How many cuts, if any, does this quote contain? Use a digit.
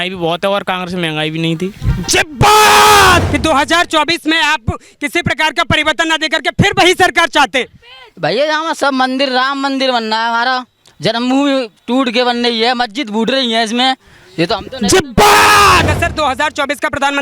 2